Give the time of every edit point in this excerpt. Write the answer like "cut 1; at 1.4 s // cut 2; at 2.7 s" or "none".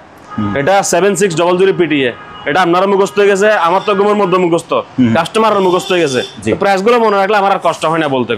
none